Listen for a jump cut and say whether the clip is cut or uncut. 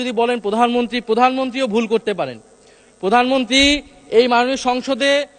uncut